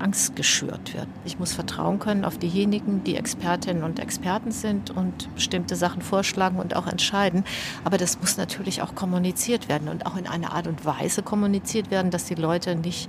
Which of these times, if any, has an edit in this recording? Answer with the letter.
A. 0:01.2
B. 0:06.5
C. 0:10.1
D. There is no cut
A